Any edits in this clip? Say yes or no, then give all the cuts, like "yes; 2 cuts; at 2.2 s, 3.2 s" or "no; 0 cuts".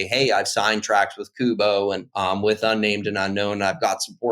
yes; 1 cut; at 2.1 s